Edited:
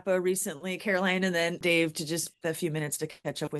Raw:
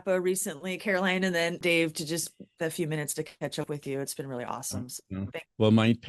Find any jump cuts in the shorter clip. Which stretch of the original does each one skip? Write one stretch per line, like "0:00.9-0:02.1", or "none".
0:02.3-0:02.5